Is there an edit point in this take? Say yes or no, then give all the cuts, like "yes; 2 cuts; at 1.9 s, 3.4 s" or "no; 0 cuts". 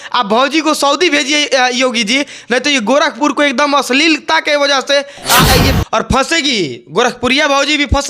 yes; 1 cut; at 5.7 s